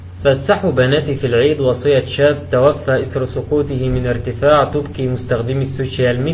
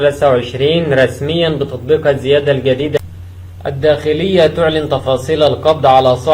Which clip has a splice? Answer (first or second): second